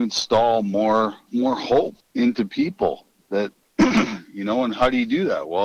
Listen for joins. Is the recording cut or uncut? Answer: cut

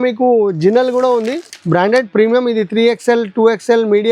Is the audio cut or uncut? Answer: uncut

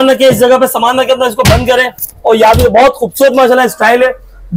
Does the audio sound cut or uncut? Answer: uncut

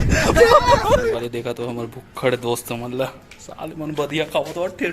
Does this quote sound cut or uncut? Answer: cut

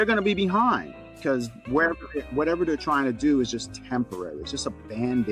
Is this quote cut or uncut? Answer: uncut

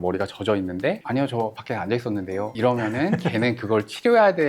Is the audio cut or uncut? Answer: cut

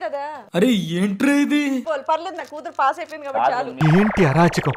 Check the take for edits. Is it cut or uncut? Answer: cut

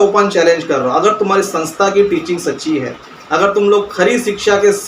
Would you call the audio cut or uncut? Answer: uncut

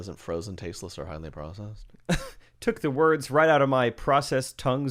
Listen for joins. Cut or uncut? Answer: uncut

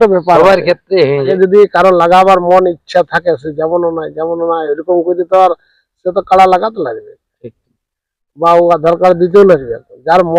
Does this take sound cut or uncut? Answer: cut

